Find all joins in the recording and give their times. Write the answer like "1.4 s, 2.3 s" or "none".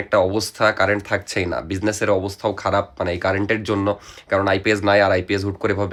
none

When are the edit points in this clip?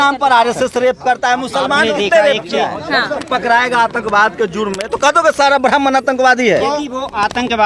3.2 s

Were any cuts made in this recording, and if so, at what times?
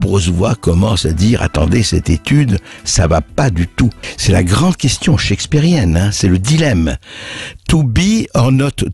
none

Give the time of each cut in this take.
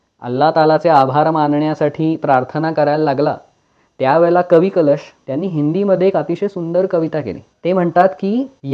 5.2 s, 7.4 s

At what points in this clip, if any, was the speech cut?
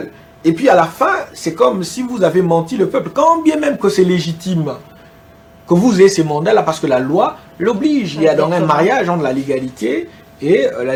none

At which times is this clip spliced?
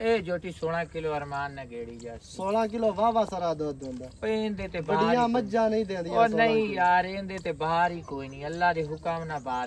none

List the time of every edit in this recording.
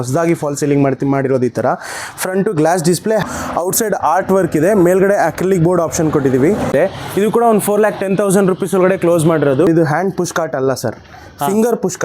3.2 s, 6.7 s, 9.7 s

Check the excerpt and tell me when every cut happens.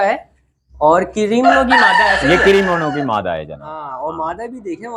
none

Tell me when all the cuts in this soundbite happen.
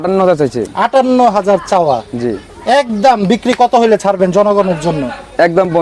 none

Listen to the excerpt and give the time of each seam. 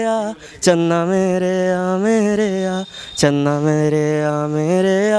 none

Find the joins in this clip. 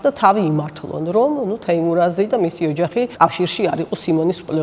3.1 s

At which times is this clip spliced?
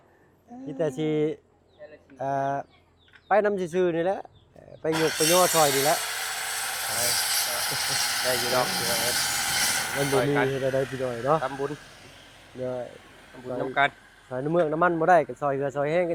none

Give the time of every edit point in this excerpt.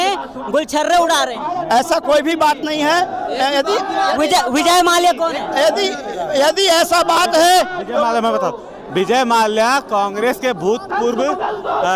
none

